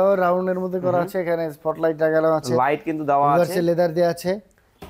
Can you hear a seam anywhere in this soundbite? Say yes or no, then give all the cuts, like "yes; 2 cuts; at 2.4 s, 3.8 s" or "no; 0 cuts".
no; 0 cuts